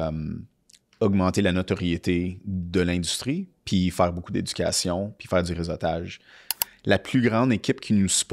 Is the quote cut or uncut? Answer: cut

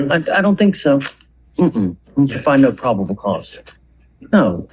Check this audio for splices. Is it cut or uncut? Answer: uncut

